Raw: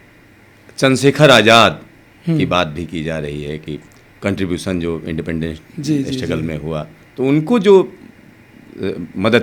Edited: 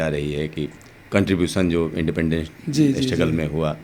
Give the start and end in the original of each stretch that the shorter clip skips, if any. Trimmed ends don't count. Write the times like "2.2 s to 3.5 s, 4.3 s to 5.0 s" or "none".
none